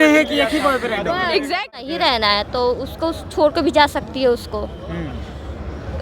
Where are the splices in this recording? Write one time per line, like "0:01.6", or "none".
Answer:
0:01.9